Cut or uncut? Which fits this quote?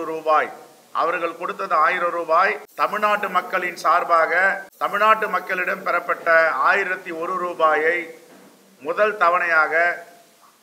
cut